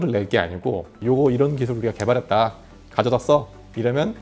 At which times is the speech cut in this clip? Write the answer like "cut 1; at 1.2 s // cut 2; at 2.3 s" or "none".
cut 1; at 1.0 s